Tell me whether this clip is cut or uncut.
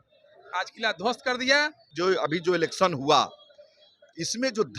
cut